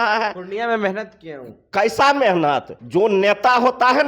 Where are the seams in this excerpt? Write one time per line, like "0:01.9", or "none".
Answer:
0:02.7